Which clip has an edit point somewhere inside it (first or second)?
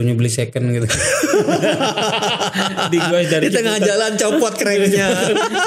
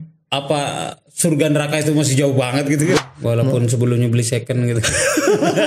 second